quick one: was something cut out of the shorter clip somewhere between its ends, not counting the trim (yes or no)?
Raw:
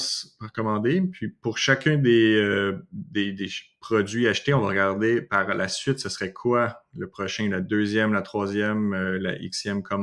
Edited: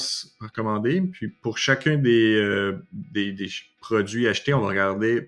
no